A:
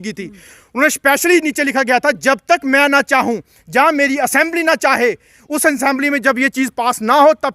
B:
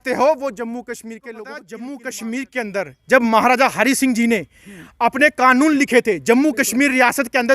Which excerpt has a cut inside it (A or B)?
B